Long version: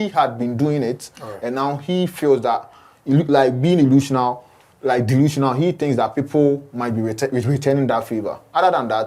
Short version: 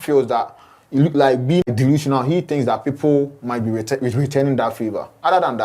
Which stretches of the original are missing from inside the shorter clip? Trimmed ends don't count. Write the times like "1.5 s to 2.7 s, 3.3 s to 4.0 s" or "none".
3.8 s to 5.0 s